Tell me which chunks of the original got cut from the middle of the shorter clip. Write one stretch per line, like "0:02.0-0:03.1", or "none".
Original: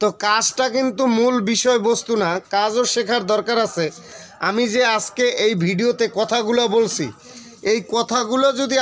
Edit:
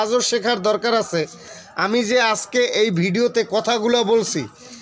none